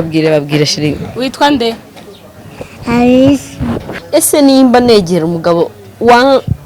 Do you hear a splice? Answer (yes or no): yes